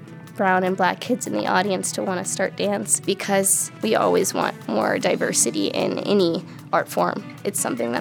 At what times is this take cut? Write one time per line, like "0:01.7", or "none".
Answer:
0:03.4
0:04.6